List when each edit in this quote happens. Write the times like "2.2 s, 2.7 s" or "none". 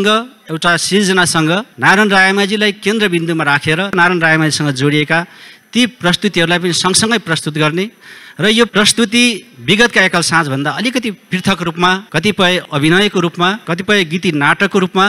4.0 s